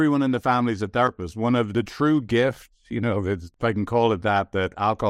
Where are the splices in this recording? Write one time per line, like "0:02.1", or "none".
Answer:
0:01.7
0:03.5